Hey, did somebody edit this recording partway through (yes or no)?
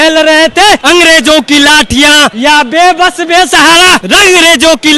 yes